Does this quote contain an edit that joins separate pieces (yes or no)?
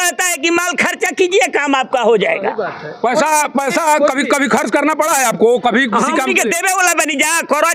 no